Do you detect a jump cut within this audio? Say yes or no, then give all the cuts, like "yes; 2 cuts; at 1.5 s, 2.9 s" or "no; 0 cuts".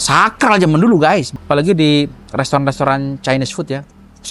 yes; 1 cut; at 1.3 s